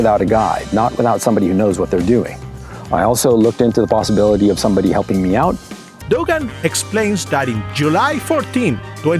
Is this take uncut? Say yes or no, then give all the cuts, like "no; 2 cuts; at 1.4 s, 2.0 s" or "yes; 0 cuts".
no; 1 cut; at 6.0 s